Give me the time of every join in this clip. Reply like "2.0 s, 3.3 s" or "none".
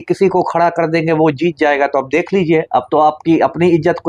none